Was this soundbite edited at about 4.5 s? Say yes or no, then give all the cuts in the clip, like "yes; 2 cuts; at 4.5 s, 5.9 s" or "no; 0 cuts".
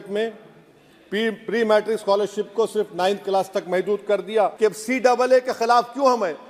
yes; 1 cut; at 4.5 s